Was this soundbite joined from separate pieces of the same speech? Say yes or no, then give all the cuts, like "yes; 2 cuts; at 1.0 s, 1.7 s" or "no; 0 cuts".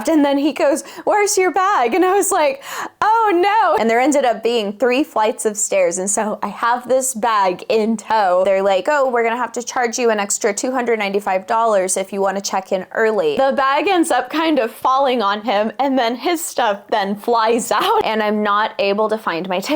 yes; 4 cuts; at 3.8 s, 8.5 s, 13.3 s, 18.0 s